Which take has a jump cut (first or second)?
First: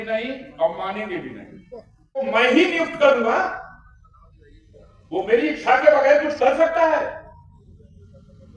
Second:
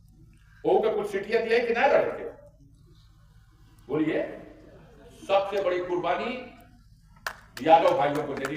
first